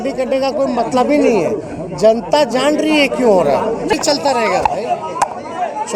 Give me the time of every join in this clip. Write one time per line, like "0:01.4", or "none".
0:03.9